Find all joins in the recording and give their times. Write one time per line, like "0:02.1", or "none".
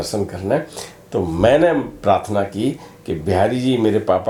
none